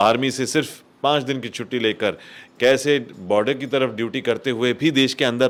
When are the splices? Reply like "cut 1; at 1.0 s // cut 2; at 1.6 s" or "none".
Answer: none